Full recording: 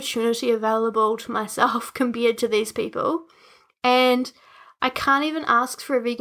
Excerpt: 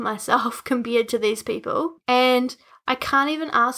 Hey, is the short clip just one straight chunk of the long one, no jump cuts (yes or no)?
no